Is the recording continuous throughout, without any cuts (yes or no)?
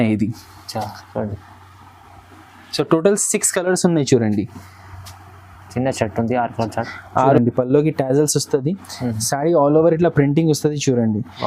no